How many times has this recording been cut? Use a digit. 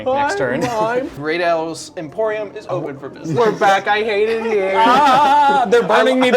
1